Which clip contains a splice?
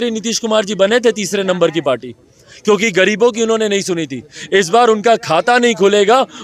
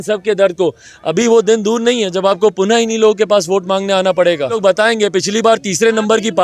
second; 1 cut; at 4.6 s

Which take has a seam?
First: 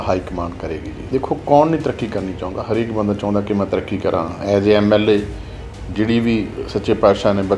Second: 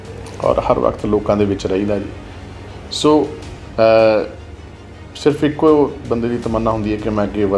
first; 1 cut; at 1.0 s

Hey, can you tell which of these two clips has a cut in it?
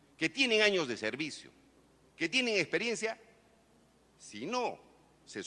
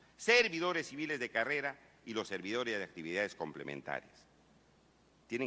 second; 1 cut; at 2.0 s

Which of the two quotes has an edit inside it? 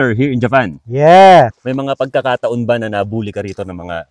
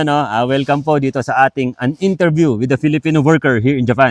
first; 1 cut; at 1.6 s

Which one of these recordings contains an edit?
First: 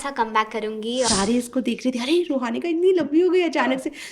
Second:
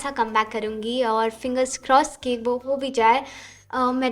first; 1 cut; at 1.1 s

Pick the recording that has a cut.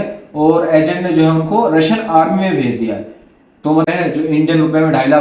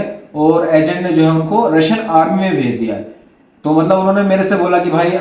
first; 1 cut; at 3.9 s

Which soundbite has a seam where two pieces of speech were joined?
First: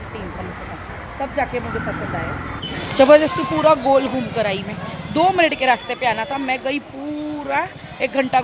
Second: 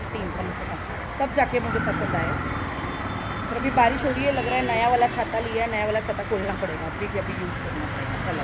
first; 1 cut; at 2.5 s

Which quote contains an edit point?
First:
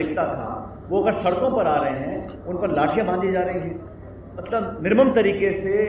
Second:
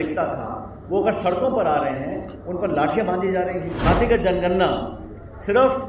second; 1 cut; at 3.9 s

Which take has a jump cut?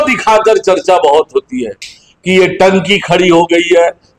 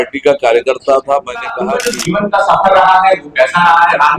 second; 1 cut; at 1.7 s

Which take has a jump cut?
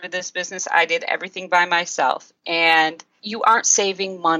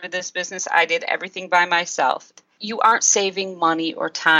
second; 1 cut; at 2.4 s

